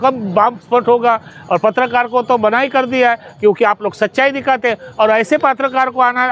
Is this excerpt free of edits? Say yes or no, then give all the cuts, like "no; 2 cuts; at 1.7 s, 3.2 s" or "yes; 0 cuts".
yes; 0 cuts